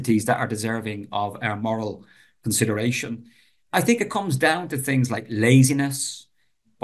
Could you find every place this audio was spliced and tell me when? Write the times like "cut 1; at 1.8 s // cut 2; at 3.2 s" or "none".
none